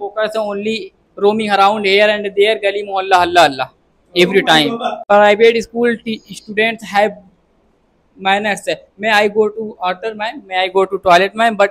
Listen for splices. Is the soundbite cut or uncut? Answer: cut